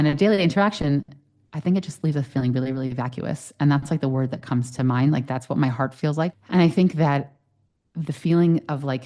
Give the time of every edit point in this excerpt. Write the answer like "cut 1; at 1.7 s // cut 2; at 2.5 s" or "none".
cut 1; at 6.3 s